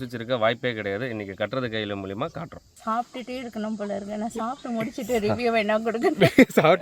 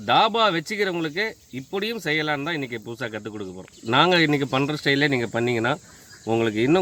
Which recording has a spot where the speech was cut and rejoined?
first; 1 cut; at 2.6 s

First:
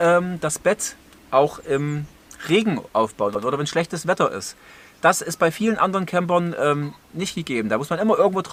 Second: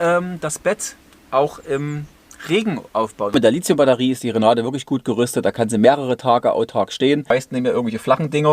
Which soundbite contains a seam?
second; 2 cuts; at 3.3 s, 7.3 s

